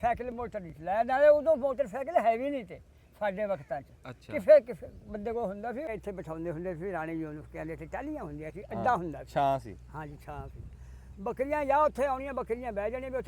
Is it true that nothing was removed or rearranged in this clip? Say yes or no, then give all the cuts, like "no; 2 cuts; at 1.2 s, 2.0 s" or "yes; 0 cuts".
no; 1 cut; at 5.9 s